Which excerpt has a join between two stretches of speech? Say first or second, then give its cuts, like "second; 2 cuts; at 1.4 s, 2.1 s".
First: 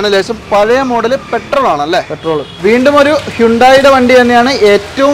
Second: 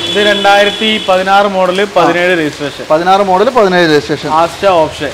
first; 1 cut; at 2.5 s